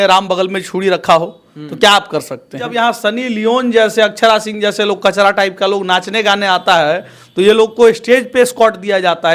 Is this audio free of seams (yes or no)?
no